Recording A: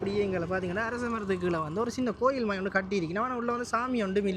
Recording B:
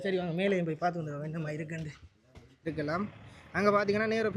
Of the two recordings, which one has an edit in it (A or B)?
B